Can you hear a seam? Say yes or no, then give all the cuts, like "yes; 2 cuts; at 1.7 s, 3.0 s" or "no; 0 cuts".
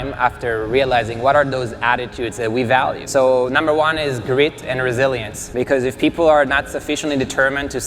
yes; 2 cuts; at 3.0 s, 5.4 s